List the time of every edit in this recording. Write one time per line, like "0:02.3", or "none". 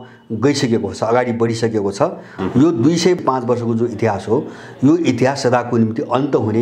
0:02.3
0:03.2